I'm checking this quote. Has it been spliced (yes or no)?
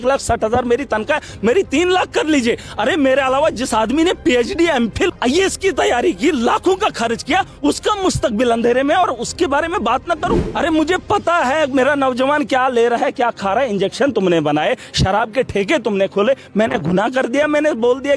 yes